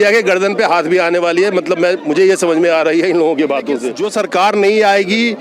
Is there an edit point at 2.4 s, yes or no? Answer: no